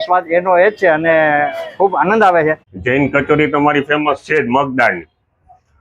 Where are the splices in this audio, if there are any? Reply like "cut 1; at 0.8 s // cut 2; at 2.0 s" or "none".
cut 1; at 2.7 s